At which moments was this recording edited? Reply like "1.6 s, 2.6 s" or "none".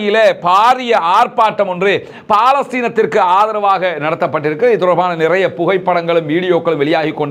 none